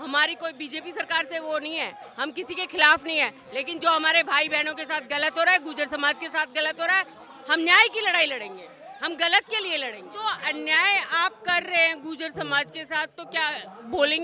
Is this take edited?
yes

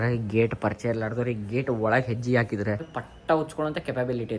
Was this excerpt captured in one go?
no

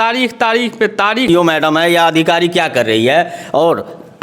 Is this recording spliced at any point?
yes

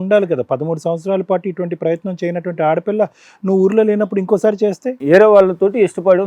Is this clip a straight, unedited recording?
no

